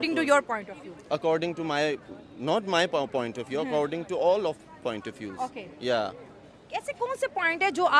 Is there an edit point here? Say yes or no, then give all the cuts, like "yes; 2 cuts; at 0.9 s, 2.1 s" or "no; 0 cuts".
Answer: no; 0 cuts